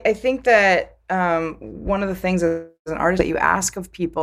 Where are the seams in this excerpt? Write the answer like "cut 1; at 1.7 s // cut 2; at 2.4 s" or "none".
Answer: none